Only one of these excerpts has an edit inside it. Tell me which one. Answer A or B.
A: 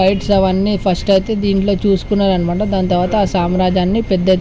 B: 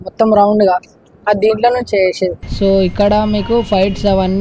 B